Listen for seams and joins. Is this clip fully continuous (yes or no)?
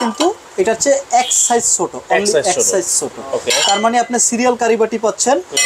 yes